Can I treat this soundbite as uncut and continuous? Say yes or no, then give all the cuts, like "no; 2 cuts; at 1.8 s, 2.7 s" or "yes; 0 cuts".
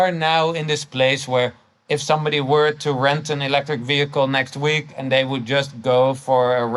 yes; 0 cuts